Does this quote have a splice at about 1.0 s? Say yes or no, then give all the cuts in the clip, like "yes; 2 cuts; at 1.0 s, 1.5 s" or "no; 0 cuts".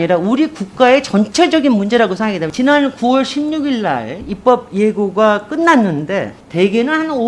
no; 1 cut; at 2.5 s